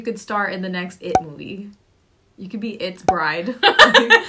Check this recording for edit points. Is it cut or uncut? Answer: uncut